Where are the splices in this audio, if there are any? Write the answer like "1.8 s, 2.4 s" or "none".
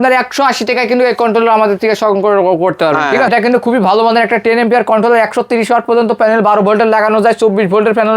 3.3 s